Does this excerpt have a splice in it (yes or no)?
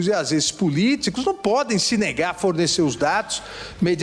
no